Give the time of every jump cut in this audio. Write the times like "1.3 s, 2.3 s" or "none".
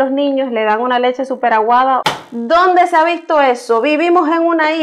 2.0 s